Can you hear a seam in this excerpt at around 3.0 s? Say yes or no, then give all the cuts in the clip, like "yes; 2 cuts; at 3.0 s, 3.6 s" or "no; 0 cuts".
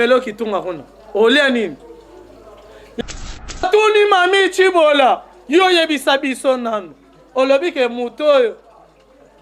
yes; 1 cut; at 3.0 s